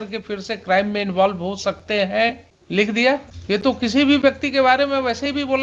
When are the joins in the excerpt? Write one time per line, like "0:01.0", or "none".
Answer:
0:02.5
0:03.3